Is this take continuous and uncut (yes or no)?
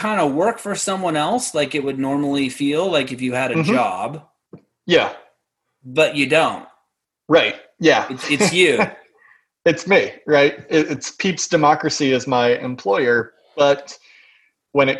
yes